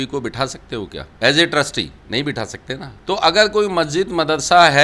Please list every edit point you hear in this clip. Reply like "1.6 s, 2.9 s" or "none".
1.0 s, 2.0 s, 2.9 s